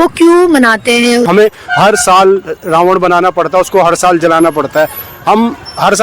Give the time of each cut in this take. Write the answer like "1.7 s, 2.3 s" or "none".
1.3 s